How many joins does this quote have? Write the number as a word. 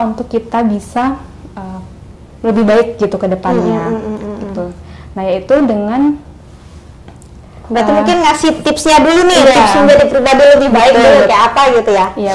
zero